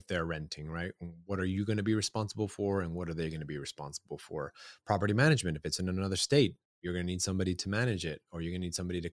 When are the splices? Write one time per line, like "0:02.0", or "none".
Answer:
none